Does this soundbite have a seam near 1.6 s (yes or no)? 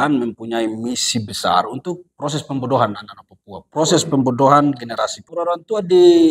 no